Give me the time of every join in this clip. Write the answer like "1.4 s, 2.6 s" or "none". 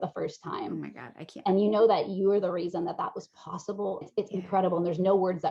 4.1 s